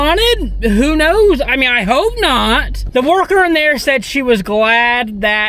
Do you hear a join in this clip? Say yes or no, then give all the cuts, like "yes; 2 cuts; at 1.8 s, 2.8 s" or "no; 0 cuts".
yes; 1 cut; at 2.8 s